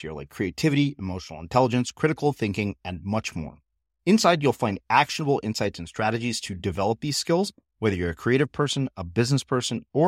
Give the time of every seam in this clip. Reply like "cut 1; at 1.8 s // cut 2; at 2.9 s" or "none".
none